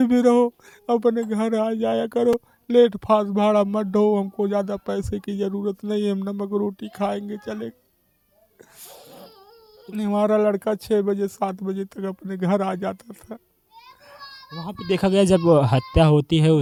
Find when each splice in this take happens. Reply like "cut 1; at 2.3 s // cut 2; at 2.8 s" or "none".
none